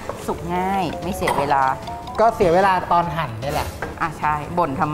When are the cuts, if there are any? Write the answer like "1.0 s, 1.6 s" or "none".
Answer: 3.8 s